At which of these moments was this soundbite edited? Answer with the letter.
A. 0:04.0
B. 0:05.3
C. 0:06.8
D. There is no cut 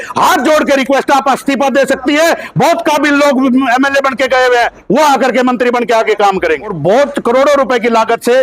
C